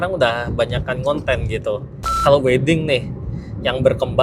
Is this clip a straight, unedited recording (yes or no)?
no